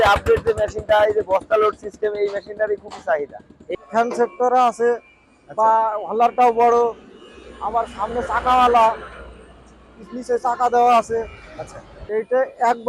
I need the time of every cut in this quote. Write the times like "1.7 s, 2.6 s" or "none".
3.6 s